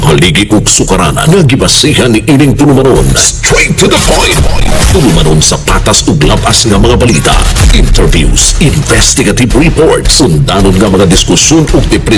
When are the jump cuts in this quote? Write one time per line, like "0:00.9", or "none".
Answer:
none